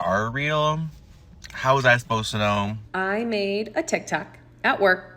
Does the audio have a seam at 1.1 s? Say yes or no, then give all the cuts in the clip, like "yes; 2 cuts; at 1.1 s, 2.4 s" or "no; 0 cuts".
no; 1 cut; at 2.8 s